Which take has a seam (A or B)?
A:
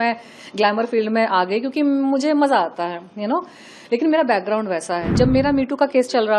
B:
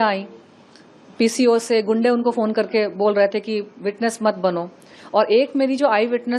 A